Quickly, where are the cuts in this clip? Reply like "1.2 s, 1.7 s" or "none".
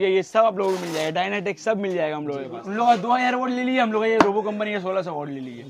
2.6 s